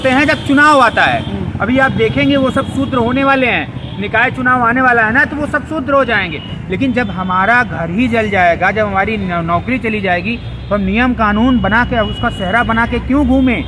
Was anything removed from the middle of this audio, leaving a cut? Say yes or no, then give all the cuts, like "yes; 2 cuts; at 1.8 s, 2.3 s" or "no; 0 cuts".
yes; 1 cut; at 6.5 s